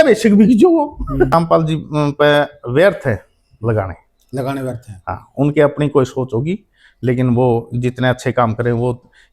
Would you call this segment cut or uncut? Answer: cut